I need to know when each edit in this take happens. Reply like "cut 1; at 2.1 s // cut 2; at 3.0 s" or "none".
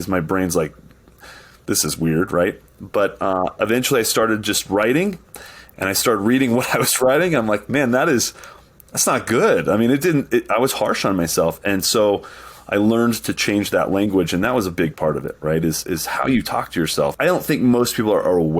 cut 1; at 17.1 s